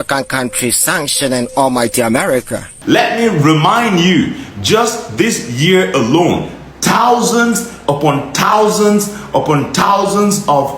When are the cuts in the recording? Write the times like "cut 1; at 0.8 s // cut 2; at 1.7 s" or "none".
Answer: cut 1; at 2.7 s